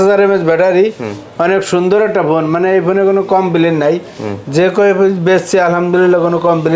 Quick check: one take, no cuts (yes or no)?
yes